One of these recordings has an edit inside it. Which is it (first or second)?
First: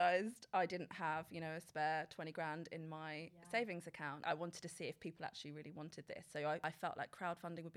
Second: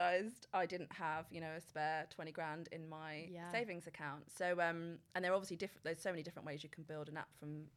first